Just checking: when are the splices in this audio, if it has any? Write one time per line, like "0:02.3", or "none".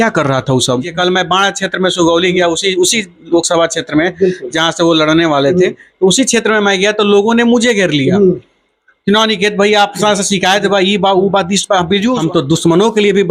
0:00.9
0:12.2